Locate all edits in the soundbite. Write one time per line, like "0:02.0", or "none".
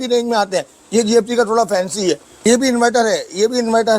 0:02.3